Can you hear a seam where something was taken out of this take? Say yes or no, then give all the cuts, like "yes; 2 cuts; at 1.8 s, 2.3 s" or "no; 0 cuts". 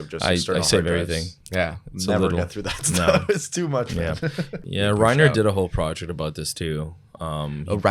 yes; 1 cut; at 4.6 s